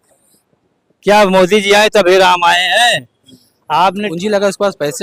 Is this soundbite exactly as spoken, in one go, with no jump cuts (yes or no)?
no